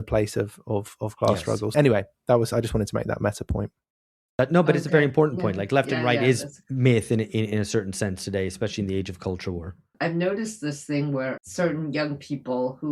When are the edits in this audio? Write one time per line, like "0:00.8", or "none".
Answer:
0:01.7
0:09.9
0:11.4